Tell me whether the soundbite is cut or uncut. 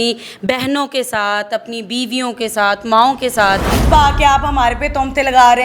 cut